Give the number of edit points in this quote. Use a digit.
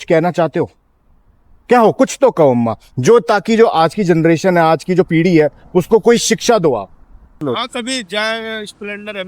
1